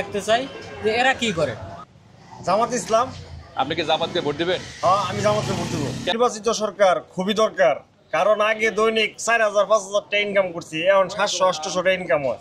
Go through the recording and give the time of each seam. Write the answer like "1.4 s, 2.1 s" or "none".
1.7 s, 6.1 s